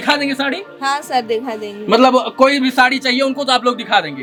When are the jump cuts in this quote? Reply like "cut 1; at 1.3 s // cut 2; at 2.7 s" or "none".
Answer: none